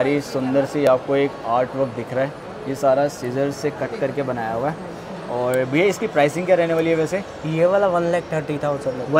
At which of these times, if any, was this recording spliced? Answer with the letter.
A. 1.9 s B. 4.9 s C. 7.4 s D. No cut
D